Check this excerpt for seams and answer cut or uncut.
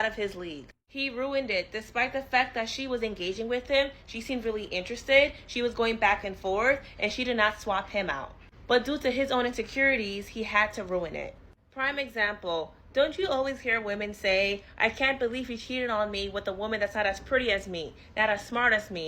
cut